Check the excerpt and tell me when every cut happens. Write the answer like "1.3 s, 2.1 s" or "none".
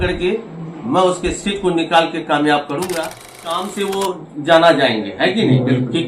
3.5 s